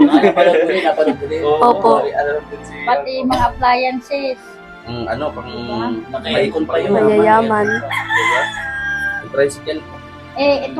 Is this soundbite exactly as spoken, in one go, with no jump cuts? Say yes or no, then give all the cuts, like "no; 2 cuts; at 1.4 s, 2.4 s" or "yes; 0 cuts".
yes; 0 cuts